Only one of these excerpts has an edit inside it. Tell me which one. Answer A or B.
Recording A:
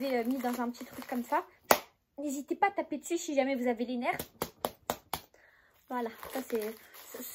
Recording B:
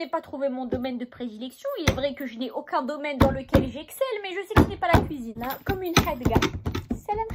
B